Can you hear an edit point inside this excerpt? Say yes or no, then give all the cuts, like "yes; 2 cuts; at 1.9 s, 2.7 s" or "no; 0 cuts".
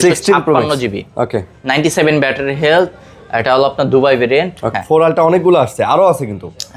yes; 1 cut; at 4.7 s